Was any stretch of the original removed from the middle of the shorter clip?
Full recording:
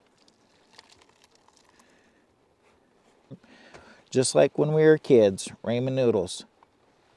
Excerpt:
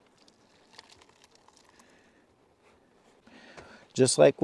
yes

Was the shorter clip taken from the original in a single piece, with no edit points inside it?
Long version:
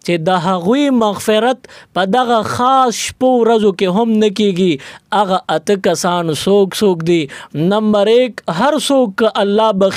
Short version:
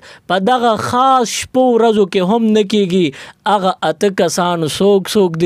yes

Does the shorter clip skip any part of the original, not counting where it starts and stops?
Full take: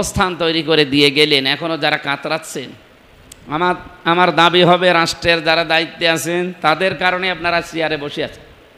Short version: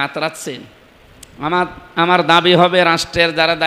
no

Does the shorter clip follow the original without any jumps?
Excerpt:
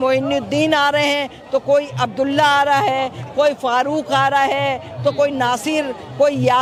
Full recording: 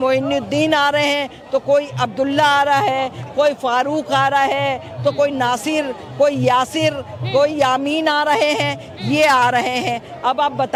yes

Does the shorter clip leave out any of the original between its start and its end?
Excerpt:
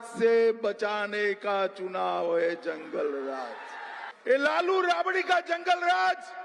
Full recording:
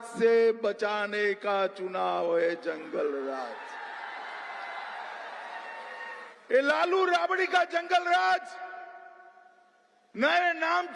yes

